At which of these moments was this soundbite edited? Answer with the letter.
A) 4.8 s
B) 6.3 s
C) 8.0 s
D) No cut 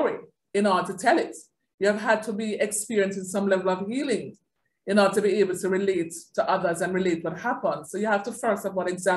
D